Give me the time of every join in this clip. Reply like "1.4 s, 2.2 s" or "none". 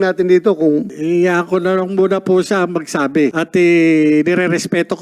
0.9 s, 3.3 s